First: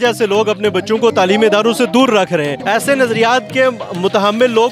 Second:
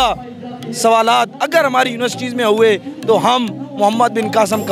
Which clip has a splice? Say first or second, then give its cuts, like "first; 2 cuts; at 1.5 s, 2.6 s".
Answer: first; 1 cut; at 2.6 s